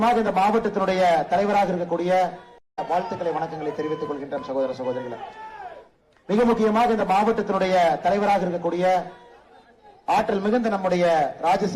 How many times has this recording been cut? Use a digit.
1